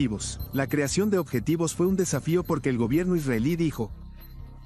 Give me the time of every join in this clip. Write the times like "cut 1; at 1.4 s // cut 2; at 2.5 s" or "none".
none